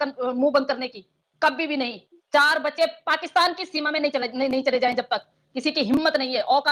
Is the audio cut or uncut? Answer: uncut